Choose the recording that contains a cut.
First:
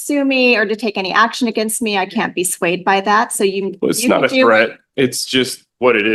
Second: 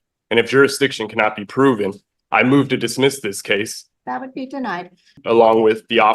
second; 2 cuts; at 3.8 s, 5.2 s

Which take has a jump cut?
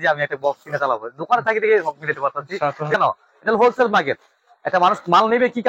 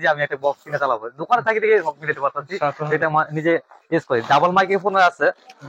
first; 1 cut; at 2.9 s

